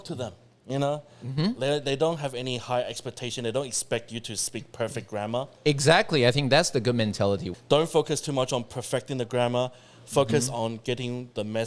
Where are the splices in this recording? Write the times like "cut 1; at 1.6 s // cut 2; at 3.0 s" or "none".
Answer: cut 1; at 7.5 s